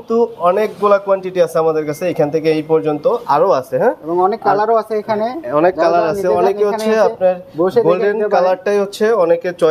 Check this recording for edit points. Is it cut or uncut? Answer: uncut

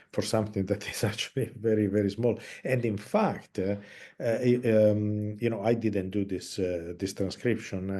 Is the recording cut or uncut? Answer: uncut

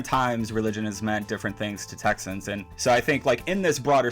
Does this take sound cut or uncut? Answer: cut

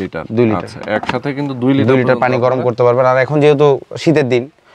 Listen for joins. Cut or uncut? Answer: uncut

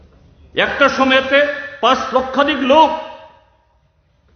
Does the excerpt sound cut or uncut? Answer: uncut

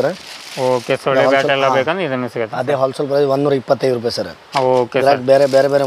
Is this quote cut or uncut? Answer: uncut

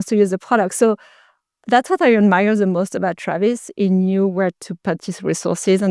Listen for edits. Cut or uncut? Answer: uncut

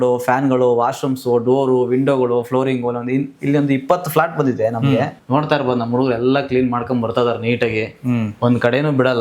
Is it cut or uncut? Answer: cut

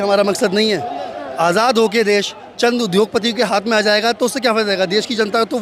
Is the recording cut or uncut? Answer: uncut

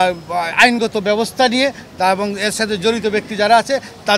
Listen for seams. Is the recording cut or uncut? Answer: uncut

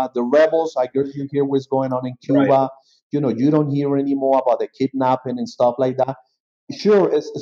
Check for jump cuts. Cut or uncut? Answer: uncut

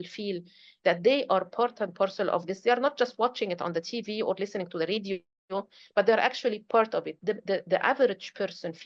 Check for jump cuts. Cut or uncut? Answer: uncut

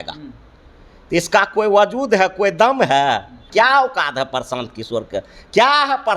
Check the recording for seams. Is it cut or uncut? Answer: cut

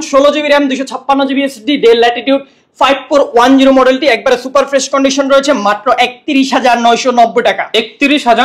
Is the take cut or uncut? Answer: uncut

